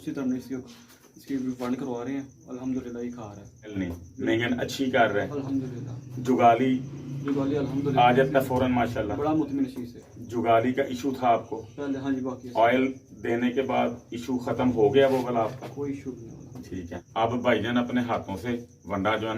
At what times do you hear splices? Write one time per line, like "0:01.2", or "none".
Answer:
0:03.8
0:17.0